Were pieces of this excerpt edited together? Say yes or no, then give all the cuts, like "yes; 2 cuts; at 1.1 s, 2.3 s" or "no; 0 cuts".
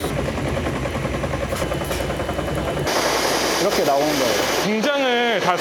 no; 0 cuts